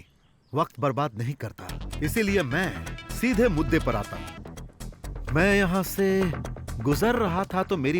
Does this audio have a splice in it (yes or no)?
yes